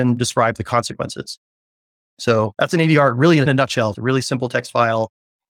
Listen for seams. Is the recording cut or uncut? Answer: cut